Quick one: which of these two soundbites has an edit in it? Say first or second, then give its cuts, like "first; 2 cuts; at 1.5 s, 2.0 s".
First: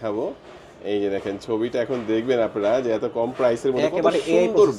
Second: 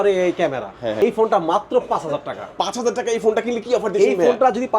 second; 1 cut; at 1.0 s